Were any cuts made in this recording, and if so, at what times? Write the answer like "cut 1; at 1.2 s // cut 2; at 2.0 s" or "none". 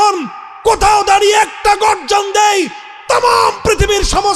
none